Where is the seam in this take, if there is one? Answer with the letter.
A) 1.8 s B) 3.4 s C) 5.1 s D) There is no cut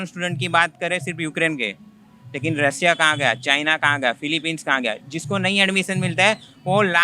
D